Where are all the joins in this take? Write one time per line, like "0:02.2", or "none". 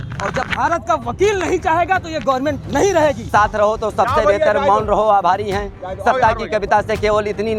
0:03.3